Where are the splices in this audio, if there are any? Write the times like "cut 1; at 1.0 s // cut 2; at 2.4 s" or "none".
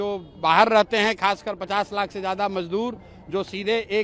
none